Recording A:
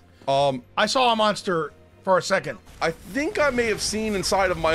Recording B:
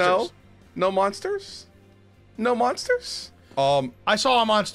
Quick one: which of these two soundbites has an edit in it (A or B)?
A